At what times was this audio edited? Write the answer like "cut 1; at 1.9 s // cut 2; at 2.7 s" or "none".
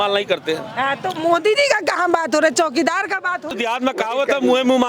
cut 1; at 3.5 s